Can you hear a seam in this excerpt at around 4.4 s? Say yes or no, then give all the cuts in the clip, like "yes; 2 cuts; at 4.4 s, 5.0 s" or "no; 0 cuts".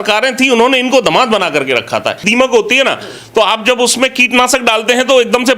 no; 1 cut; at 2.2 s